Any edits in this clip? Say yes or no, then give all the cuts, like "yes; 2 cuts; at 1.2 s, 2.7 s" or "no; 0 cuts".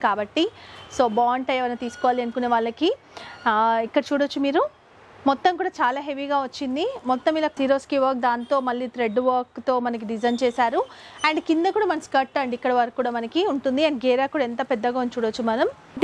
no; 0 cuts